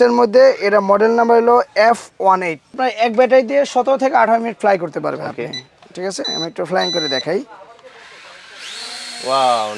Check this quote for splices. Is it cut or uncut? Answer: cut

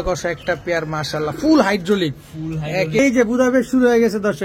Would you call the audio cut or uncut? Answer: cut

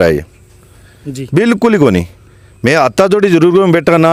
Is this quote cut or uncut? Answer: uncut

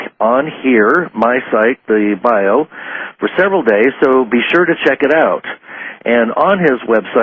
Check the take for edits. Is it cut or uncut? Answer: uncut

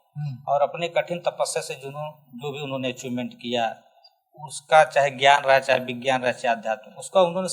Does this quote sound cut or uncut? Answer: uncut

